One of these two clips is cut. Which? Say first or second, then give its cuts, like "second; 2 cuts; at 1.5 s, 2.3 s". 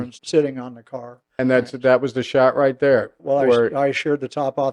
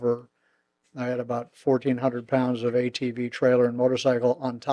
first; 1 cut; at 1.3 s